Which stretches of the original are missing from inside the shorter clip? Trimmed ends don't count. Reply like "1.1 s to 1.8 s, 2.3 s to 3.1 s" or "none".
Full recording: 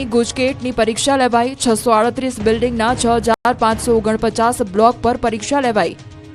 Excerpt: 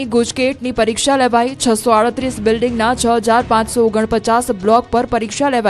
3.4 s to 3.5 s